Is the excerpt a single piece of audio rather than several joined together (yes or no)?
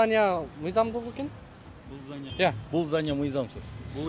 no